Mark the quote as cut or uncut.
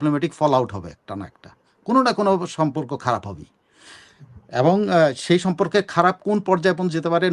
uncut